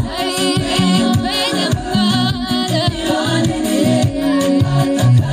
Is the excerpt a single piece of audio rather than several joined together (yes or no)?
yes